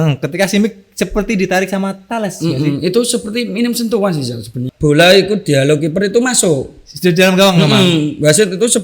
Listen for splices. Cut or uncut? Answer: cut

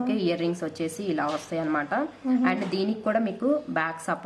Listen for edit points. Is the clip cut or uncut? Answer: uncut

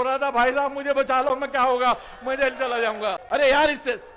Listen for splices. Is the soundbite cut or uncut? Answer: cut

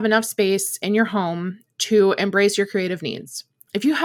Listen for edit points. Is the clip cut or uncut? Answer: uncut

